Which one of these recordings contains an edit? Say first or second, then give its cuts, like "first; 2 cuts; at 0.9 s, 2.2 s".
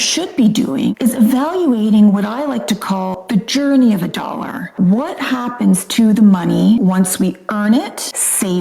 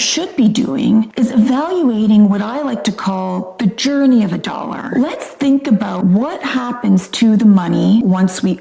first; 3 cuts; at 0.9 s, 3.2 s, 4.6 s